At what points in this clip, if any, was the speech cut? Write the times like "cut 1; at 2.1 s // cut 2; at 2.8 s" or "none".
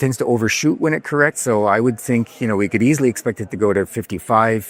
none